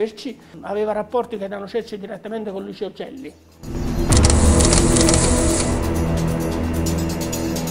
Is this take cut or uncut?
uncut